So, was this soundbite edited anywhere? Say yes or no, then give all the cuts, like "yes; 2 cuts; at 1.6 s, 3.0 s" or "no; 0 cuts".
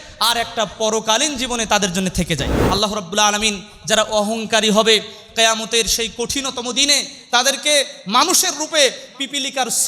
yes; 1 cut; at 2.5 s